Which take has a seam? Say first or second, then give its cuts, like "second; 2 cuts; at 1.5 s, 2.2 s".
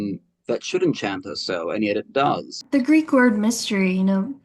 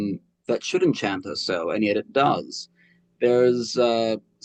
first; 1 cut; at 2.5 s